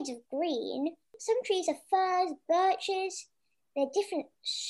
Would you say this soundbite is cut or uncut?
cut